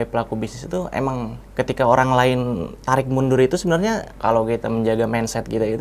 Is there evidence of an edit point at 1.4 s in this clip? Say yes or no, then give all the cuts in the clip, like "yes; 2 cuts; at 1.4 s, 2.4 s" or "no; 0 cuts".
yes; 2 cuts; at 1.4 s, 4.1 s